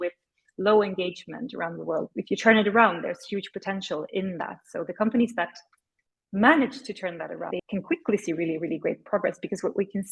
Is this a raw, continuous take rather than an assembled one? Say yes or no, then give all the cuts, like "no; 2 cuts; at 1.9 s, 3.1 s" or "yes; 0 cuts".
no; 2 cuts; at 2.1 s, 7.6 s